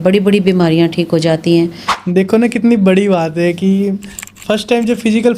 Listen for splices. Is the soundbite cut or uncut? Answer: cut